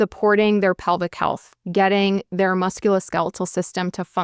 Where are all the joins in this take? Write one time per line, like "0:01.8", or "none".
none